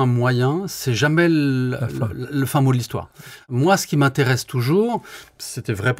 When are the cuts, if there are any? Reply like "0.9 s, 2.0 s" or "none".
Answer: 3.5 s